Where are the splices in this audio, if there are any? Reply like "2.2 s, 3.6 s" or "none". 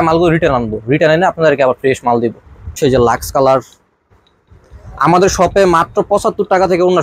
2.8 s